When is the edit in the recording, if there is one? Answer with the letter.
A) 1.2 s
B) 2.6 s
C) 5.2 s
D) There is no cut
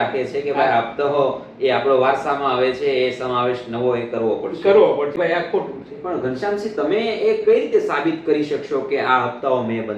C